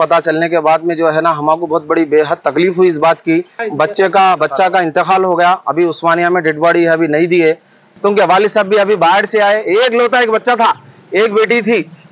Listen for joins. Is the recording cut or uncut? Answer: cut